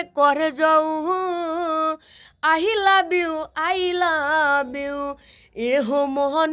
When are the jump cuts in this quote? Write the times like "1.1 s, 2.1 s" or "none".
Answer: none

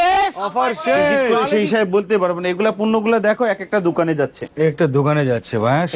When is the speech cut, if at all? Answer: 1.3 s

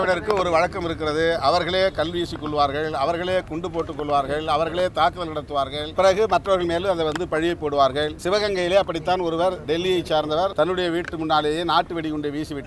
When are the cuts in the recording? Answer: 5.9 s, 8.2 s, 9.6 s, 10.5 s

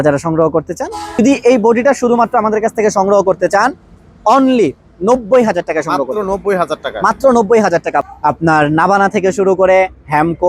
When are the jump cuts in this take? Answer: 1.2 s, 8.0 s

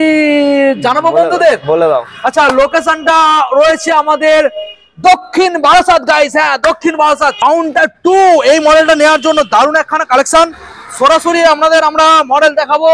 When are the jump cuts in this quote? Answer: 7.4 s

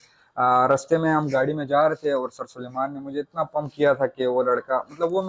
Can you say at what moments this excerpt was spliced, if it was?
none

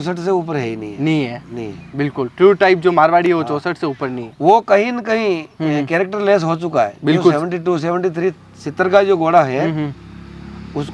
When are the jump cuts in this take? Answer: none

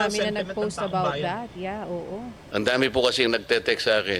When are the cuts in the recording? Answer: 2.4 s

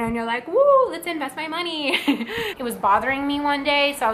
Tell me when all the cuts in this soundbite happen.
2.5 s

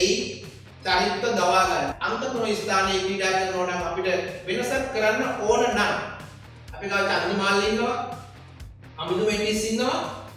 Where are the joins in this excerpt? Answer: 2.0 s

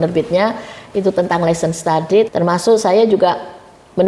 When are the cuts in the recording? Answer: 2.3 s

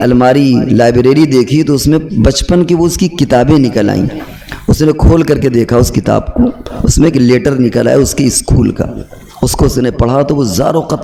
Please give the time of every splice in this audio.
none

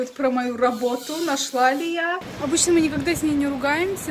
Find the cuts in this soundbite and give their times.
2.2 s

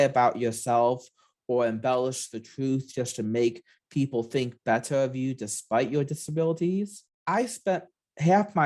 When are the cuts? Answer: 7.1 s

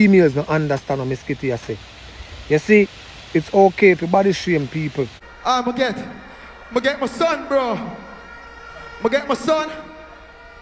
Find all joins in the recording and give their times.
5.2 s

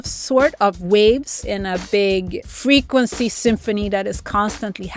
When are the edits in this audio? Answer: 1.5 s, 2.4 s

